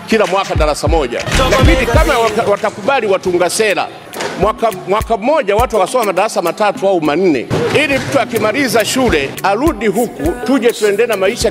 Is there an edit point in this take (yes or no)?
yes